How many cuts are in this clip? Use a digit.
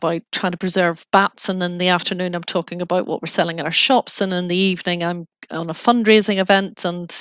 0